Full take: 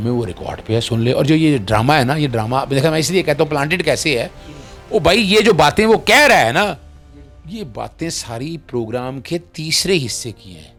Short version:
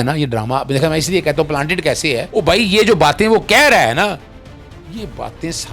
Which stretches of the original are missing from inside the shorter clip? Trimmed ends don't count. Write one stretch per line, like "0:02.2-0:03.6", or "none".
0:04.3-0:04.8